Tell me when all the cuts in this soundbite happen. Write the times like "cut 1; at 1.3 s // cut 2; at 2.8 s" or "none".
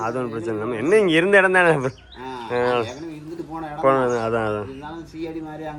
none

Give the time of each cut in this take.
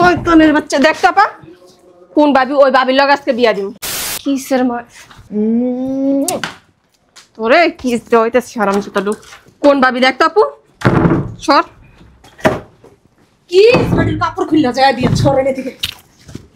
cut 1; at 4.1 s

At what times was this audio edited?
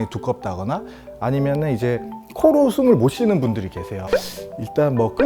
cut 1; at 4.0 s

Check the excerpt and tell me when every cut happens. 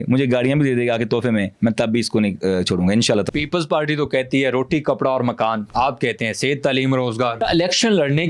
cut 1; at 3.3 s // cut 2; at 5.6 s // cut 3; at 7.4 s

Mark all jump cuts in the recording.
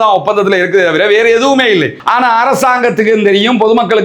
cut 1; at 2.0 s

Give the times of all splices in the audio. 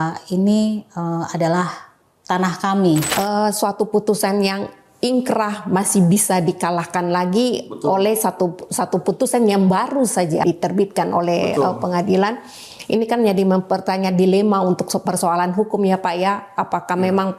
cut 1; at 3.1 s // cut 2; at 10.4 s

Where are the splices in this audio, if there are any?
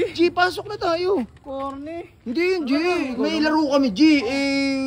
cut 1; at 3.1 s

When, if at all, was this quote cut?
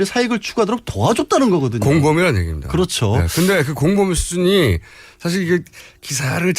cut 1; at 4.3 s

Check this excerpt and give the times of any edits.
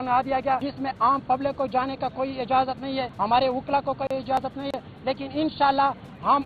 none

